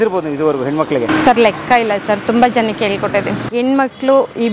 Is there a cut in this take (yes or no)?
yes